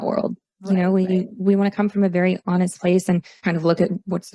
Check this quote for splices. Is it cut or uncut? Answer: cut